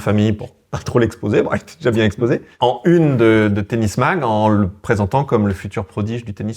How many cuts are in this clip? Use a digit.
1